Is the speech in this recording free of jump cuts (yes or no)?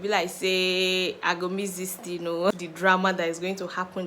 no